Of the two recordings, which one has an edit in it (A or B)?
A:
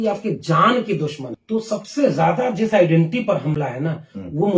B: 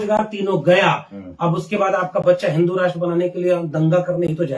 A